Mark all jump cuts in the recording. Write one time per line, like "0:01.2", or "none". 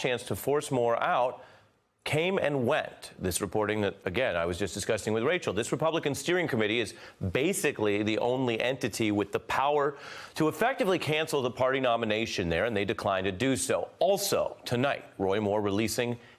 0:10.2